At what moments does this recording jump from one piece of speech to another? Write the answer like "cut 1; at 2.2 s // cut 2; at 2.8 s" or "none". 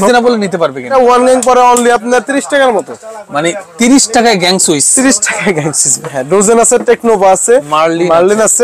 cut 1; at 0.9 s // cut 2; at 5.9 s